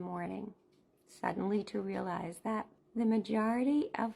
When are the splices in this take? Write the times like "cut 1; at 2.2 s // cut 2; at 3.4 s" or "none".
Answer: cut 1; at 2.8 s